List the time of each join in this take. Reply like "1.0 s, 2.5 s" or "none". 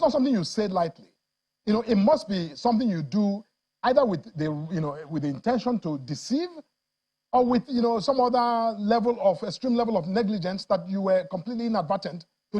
none

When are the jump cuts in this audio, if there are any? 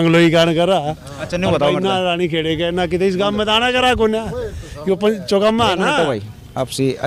none

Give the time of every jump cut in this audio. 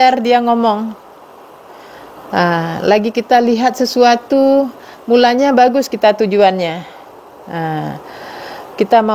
none

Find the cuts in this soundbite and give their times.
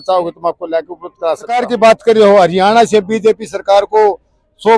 1.6 s

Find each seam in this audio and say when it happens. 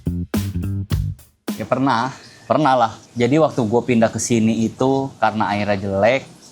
1.5 s

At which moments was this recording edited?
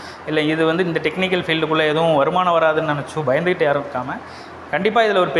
none

